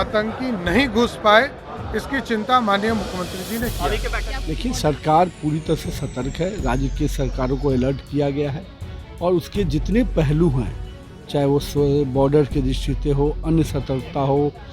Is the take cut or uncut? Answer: cut